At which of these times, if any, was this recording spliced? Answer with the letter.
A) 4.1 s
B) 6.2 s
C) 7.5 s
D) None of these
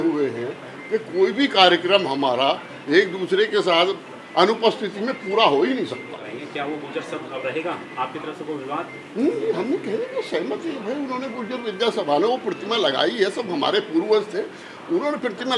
B